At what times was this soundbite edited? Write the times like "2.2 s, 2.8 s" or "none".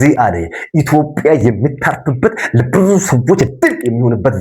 none